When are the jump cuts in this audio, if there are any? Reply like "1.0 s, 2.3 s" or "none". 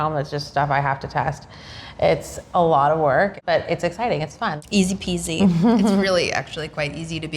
3.4 s, 4.6 s